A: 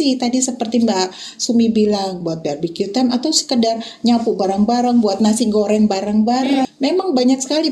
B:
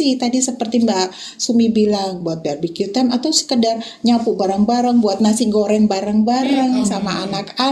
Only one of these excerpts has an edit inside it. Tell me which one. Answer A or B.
A